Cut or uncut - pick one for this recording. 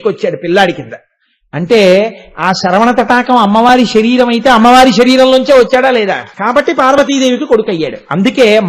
cut